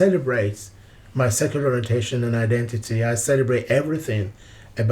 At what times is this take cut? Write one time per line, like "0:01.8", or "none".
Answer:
none